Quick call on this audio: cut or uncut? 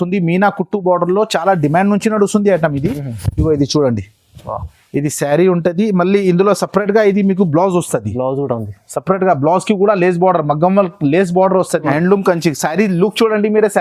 cut